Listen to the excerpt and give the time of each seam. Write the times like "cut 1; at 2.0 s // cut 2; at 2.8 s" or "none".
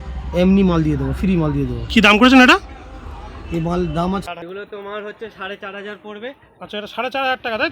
cut 1; at 4.3 s